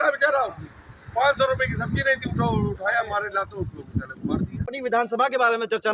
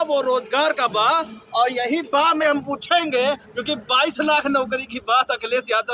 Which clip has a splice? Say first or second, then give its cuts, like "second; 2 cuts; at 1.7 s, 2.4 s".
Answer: first; 1 cut; at 4.7 s